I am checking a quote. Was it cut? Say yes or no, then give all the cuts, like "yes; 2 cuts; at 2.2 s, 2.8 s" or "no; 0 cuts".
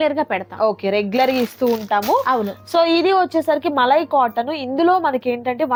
no; 0 cuts